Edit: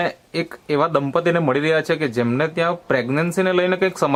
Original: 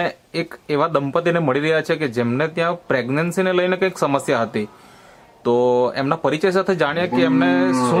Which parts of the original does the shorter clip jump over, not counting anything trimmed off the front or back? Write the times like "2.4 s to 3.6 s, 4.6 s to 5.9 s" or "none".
none

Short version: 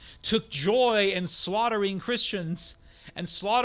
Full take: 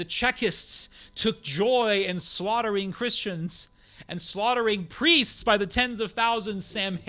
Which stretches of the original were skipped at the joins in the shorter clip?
none

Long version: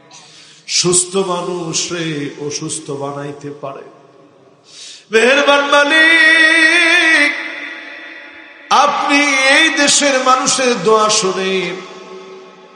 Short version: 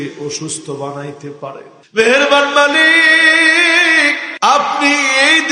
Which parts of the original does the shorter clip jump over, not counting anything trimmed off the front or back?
3.9 s to 4.9 s, 7.4 s to 8.5 s

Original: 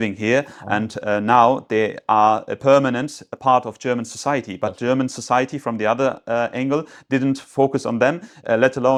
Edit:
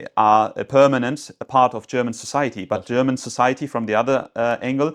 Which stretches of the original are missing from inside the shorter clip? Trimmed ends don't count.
none

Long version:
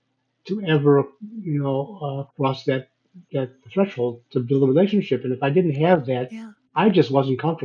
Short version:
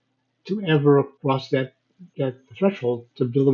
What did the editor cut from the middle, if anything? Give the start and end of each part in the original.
1.1 s to 2.3 s

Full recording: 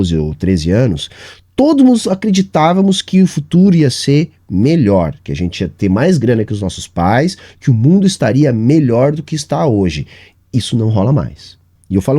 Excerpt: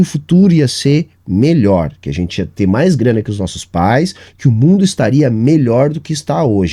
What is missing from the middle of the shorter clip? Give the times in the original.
none

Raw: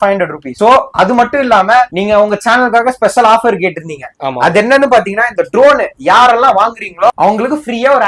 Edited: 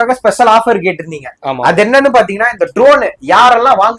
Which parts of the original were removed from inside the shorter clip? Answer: none

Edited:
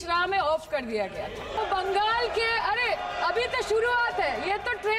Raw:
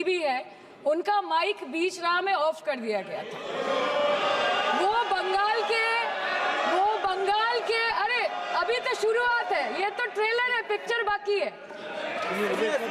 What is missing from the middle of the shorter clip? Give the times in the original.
3.5 s to 6.9 s

